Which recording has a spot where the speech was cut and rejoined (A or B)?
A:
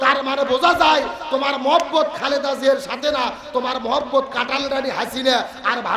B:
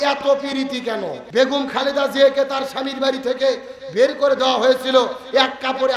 B